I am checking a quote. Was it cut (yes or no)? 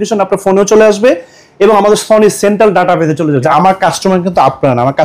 yes